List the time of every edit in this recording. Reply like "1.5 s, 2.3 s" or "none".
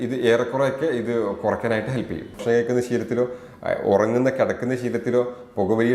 2.4 s